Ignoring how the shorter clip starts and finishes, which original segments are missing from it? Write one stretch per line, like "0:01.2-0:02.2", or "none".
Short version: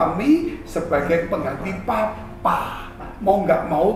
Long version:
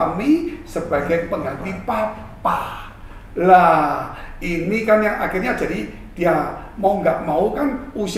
0:03.1-0:06.6